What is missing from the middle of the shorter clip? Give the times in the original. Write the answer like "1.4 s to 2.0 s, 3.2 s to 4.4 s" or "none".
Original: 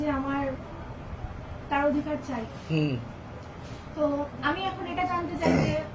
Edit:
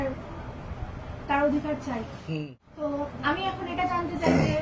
2.6 s to 3.4 s